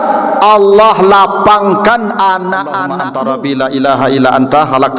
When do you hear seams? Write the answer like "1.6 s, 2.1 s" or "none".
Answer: 2.9 s